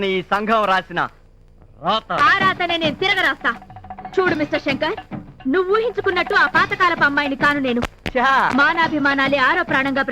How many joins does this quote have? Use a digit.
0